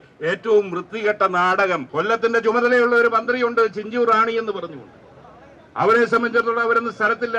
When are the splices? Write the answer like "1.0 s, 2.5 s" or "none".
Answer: 1.9 s